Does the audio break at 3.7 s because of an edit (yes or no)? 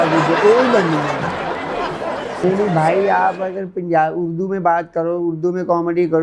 no